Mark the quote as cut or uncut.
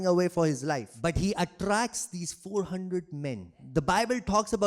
cut